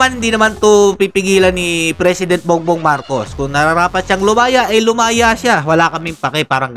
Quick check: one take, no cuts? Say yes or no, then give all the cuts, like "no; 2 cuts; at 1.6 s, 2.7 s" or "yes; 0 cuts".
yes; 0 cuts